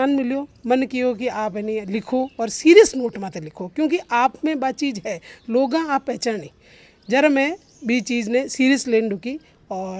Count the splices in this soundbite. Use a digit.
0